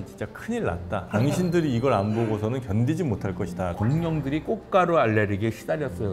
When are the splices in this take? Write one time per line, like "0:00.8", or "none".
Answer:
0:01.1
0:03.7

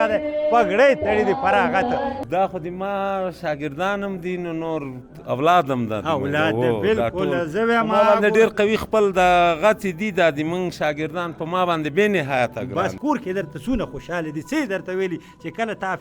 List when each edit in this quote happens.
0:02.2
0:13.0

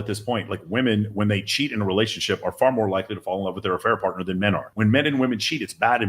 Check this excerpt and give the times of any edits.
0:04.7

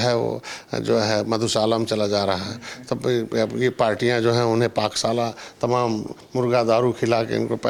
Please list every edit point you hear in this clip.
none

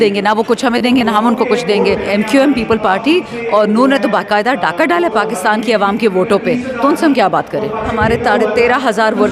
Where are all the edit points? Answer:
0:02.1
0:07.9

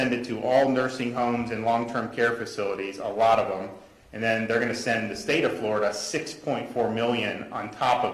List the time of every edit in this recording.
none

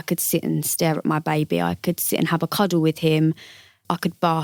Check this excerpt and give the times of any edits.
none

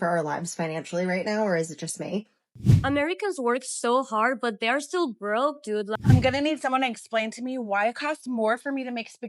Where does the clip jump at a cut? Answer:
0:02.4
0:05.9

